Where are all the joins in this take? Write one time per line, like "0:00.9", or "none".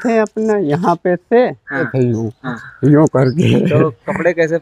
0:01.9